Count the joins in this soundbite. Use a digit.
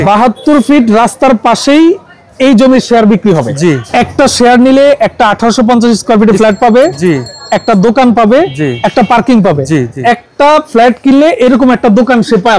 2